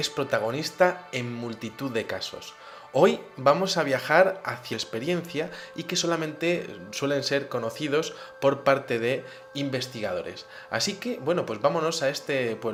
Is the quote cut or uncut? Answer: uncut